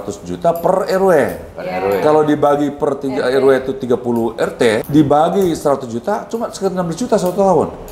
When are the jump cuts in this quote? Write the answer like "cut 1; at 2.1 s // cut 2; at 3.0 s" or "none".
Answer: cut 1; at 4.8 s